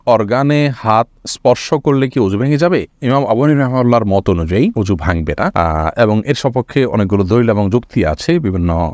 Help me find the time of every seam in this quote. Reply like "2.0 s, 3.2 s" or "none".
none